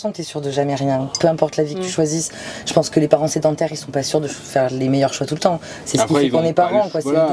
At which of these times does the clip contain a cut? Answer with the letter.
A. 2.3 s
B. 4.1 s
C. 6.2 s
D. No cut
D